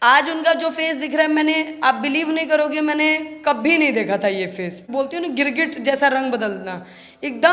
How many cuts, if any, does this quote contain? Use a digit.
1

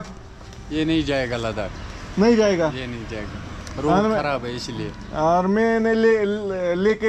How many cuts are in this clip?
0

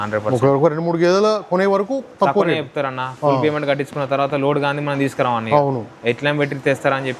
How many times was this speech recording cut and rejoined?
0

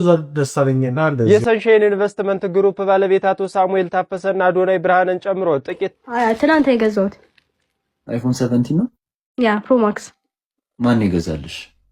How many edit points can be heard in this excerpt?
2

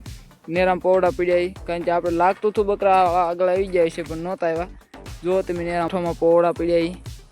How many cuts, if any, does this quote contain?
1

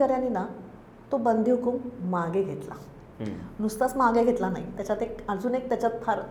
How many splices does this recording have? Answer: 0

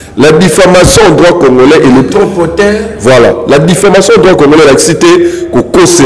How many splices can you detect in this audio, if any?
0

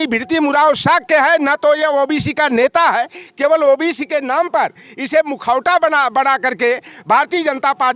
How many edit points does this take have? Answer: 0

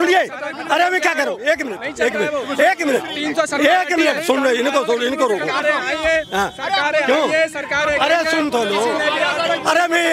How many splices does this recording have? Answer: 0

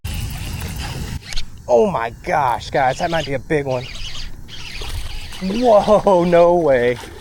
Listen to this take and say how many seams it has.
0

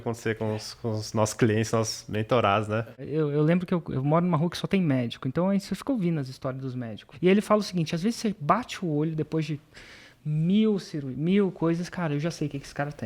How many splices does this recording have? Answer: 2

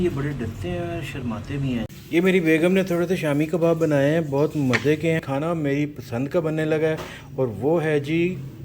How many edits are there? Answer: 2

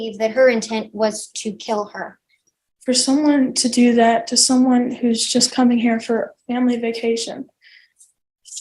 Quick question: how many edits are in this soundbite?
1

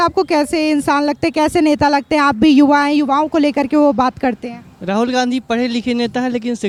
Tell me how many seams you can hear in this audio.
0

